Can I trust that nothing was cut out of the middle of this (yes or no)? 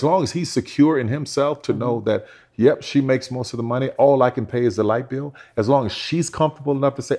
yes